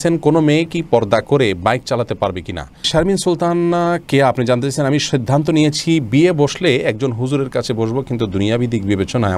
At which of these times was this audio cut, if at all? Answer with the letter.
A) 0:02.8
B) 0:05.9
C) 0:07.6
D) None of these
A